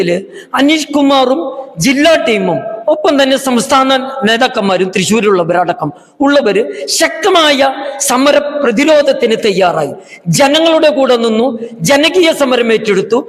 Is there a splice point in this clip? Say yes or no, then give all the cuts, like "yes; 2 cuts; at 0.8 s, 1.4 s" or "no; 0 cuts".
no; 0 cuts